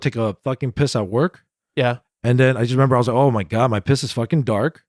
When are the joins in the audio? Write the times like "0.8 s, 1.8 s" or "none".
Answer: none